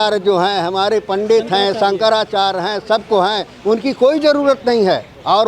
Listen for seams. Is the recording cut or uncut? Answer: uncut